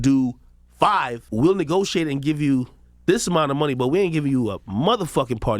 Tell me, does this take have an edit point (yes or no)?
yes